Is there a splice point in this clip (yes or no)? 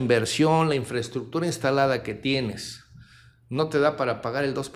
no